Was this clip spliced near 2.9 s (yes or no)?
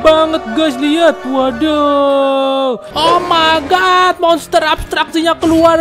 yes